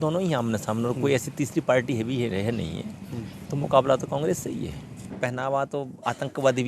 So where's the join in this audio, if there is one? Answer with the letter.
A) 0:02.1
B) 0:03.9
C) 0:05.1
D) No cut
C